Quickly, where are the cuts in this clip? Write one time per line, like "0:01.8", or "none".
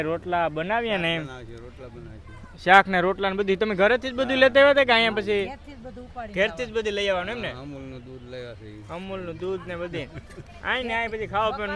none